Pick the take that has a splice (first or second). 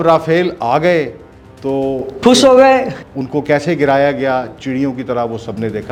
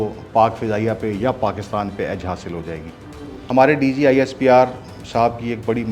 second